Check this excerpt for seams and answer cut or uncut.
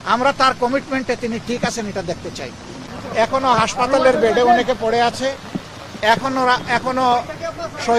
cut